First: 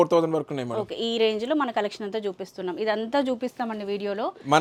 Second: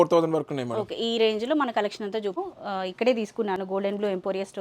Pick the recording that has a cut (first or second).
second